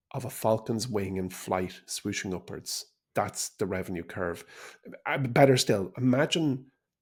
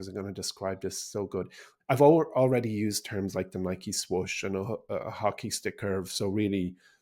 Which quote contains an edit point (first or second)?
second